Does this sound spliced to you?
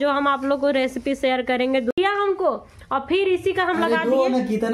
yes; 1 cut; at 2.0 s

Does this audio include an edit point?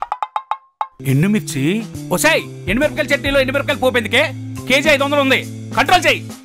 yes; 1 cut; at 1.0 s

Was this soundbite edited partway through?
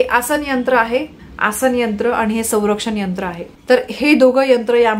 yes; 2 cuts; at 1.2 s, 3.5 s

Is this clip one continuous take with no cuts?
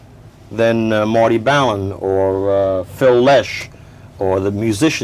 no; 1 cut; at 2.7 s

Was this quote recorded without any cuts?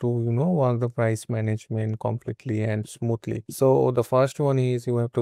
yes; 0 cuts

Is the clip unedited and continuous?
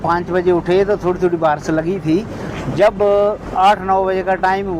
yes; 0 cuts

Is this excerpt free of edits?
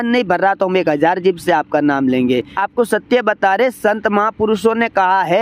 no; 1 cut; at 2.5 s

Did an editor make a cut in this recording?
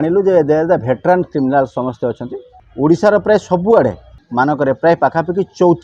yes; 2 cuts; at 2.6 s, 4.2 s

